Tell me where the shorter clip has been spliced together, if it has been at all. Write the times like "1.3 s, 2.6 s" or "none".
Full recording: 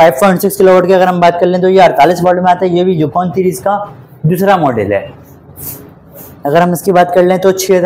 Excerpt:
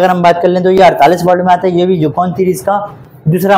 none